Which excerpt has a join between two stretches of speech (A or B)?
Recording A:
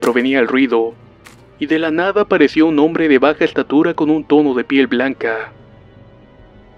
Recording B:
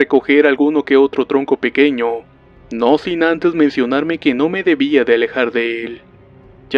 A